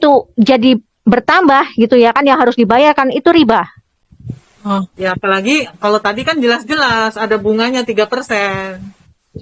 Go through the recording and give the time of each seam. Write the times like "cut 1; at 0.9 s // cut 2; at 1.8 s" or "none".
none